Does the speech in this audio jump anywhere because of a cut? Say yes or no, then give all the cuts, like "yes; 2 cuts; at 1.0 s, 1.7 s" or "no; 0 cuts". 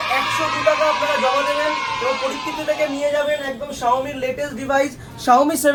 no; 0 cuts